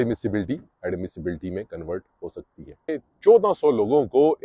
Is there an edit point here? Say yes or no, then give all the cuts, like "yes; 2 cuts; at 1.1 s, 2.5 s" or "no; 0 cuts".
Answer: yes; 1 cut; at 3.0 s